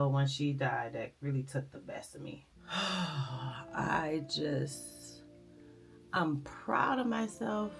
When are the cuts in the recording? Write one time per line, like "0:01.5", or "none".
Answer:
0:02.5